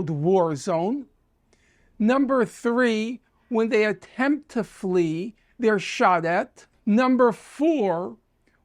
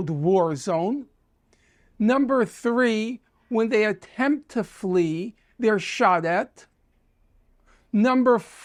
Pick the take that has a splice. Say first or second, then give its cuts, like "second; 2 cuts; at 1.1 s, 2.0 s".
first; 1 cut; at 6.6 s